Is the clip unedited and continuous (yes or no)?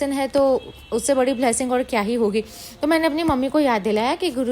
yes